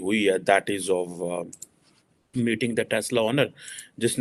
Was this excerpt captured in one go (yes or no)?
yes